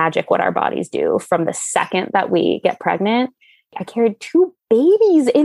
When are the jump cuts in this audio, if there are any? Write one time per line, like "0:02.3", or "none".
0:03.8